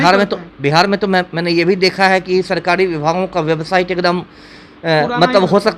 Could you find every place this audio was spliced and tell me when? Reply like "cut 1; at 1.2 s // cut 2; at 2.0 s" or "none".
none